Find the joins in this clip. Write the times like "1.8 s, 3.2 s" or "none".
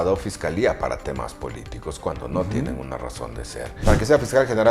3.7 s